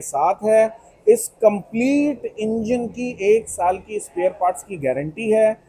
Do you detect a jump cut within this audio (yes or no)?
no